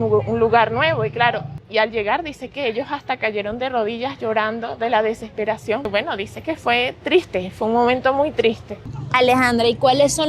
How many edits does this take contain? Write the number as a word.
three